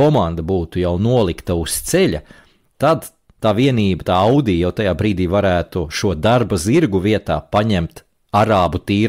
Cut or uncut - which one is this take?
uncut